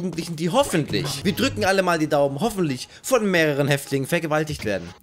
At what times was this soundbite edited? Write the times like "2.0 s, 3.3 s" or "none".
1.1 s